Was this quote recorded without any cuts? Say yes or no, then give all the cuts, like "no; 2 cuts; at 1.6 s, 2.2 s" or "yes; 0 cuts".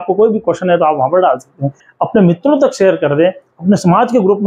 no; 1 cut; at 1.8 s